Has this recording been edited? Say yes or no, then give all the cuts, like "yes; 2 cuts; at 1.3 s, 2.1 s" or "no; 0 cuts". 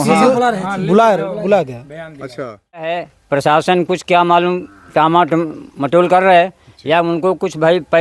yes; 1 cut; at 2.9 s